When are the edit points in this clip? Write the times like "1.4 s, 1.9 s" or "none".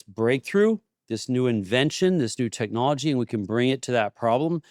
none